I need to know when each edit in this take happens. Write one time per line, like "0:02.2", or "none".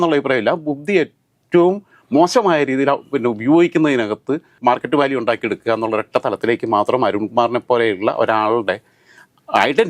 0:04.5